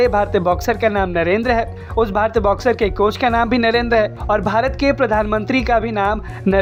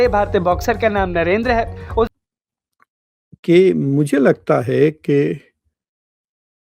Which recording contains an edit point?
second; 1 cut; at 2.1 s

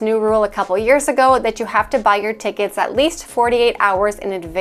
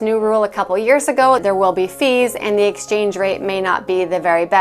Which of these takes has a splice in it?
second; 1 cut; at 1.4 s

